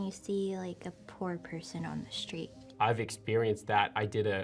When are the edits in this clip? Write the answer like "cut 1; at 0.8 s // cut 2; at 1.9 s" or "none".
none